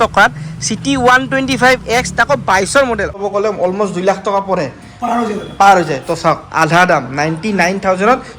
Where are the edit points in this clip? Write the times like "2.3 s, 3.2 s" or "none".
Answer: 3.2 s